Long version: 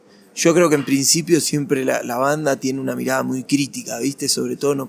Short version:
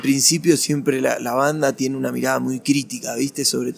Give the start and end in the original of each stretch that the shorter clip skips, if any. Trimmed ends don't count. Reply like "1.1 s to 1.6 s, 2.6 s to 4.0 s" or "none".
none